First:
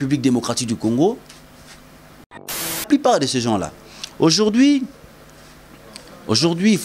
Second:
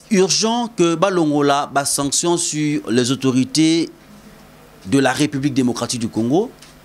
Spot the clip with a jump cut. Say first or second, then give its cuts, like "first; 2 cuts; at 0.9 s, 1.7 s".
first; 1 cut; at 2.4 s